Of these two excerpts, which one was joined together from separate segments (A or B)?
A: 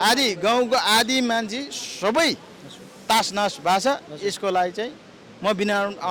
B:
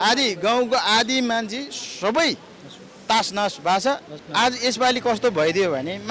B